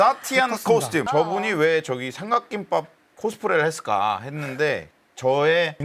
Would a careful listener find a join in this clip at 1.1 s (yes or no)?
yes